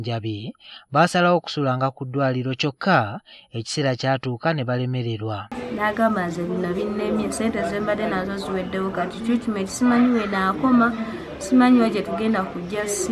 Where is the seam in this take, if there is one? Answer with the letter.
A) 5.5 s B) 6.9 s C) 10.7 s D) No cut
A